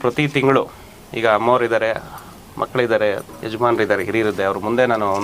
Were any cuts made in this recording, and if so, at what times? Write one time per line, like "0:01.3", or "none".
none